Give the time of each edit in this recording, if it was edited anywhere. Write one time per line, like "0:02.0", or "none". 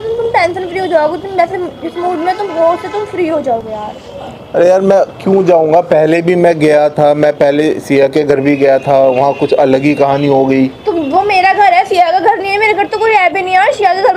none